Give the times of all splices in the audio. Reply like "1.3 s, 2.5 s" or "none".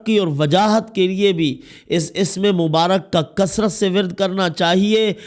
none